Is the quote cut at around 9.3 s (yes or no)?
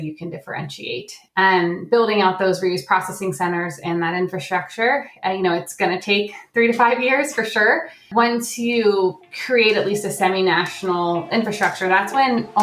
yes